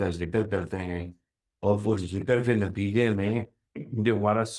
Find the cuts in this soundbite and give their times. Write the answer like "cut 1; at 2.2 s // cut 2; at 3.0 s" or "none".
none